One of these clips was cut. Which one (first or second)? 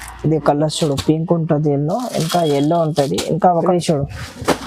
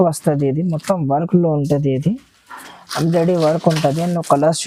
first